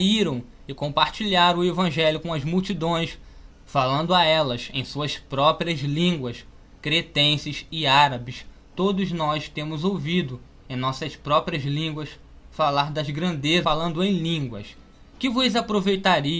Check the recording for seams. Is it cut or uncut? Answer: uncut